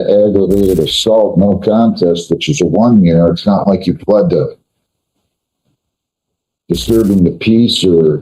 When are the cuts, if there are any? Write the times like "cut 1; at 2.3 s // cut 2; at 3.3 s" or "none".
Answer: none